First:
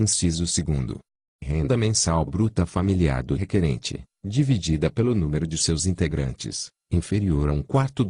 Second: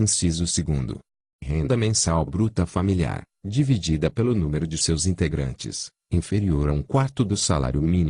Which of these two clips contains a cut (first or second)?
second